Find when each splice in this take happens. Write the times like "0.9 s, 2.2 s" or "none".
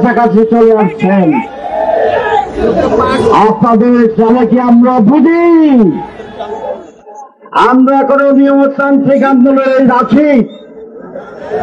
7.3 s